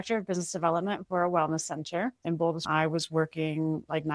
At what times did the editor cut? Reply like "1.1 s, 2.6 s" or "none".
2.7 s